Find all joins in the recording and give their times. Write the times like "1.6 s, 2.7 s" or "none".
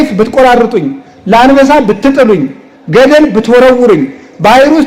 none